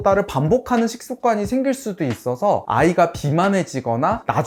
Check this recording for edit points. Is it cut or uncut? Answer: uncut